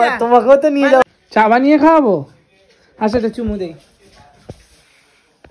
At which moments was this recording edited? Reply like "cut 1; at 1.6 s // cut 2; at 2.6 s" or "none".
cut 1; at 1.0 s